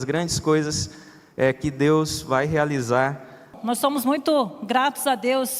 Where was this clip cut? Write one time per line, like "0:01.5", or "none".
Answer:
0:03.5